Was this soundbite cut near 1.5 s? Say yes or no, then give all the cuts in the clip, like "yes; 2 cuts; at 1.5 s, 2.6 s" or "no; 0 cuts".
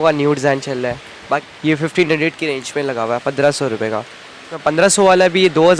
yes; 2 cuts; at 1.5 s, 4.5 s